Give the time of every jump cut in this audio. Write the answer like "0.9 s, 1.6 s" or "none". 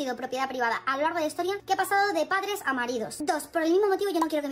3.1 s

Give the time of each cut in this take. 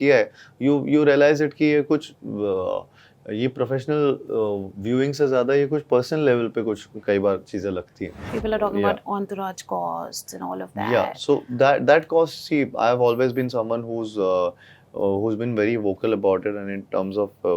8.2 s

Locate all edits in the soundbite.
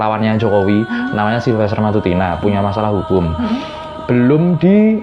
none

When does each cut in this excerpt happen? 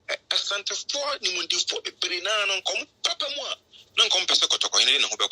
none

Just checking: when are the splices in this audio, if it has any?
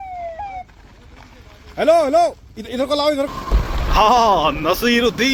none

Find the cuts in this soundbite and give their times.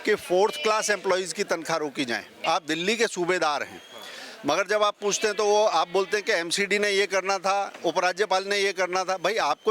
2.3 s

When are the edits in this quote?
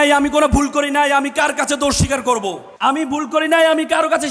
2.7 s

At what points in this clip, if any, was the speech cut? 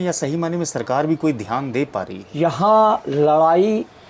2.2 s

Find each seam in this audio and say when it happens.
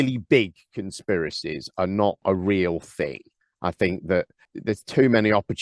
2.2 s, 4.4 s

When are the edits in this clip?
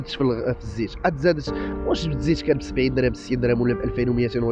none

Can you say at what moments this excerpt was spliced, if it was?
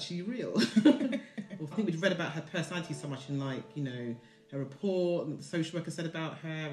1.7 s

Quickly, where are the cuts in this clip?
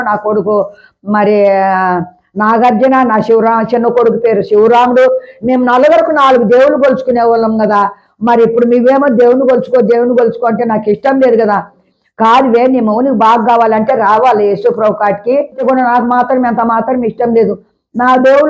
11.8 s, 15.6 s

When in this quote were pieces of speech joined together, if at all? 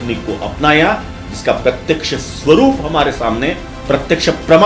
3.7 s

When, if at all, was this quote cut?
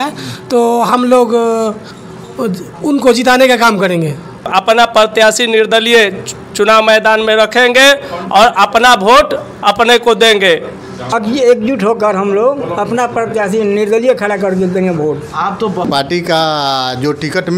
4.5 s, 11.1 s, 15.9 s

